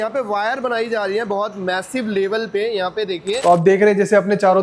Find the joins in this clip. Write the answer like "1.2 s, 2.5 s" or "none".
3.3 s